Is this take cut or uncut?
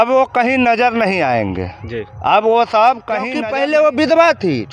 cut